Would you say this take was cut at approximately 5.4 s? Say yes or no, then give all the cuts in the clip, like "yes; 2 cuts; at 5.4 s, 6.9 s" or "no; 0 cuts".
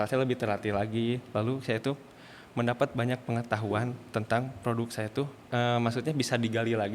yes; 1 cut; at 5.4 s